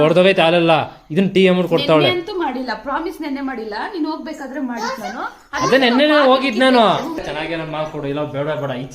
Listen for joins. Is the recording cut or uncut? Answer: cut